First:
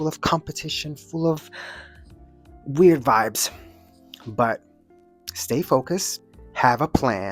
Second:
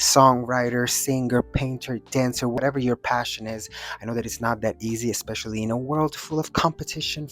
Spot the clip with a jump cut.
second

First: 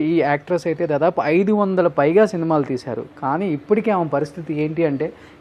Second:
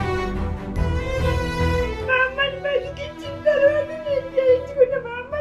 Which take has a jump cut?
second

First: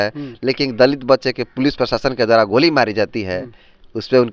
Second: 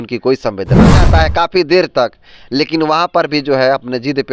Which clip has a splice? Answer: second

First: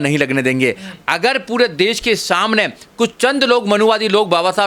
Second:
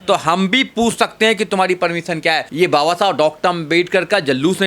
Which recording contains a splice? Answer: second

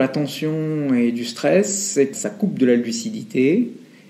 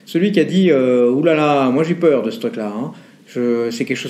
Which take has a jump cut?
first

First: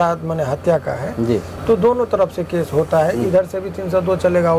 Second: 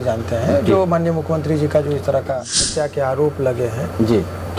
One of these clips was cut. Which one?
second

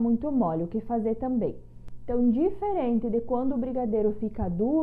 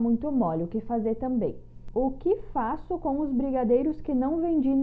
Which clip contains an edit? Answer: second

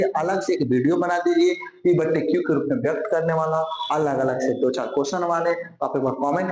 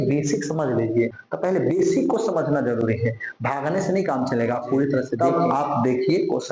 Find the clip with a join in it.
second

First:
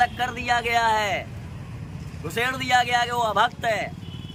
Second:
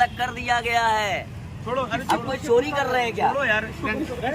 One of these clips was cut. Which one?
second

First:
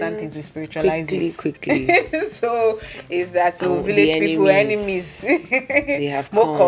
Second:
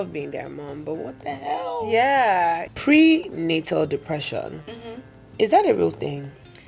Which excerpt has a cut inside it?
second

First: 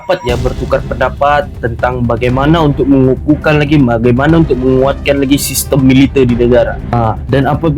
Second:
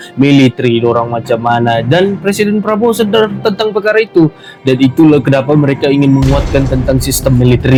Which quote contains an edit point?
first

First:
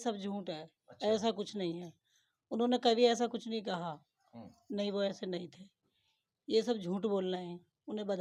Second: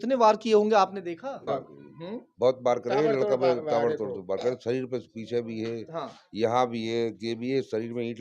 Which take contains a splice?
second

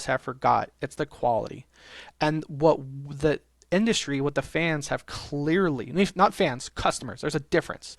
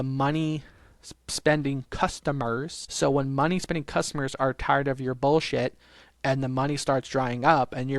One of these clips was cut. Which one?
second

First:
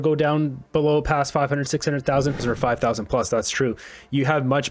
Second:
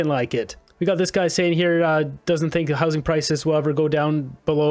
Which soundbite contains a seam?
first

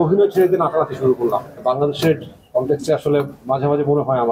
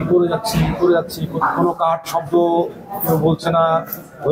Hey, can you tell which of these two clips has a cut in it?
first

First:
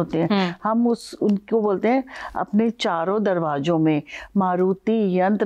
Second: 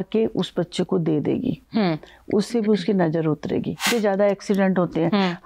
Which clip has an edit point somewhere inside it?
second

